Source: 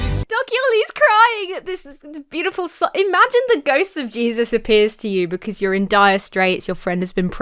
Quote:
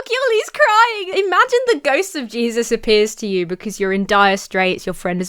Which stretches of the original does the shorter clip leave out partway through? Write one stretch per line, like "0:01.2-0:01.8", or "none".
0:01.5-0:02.9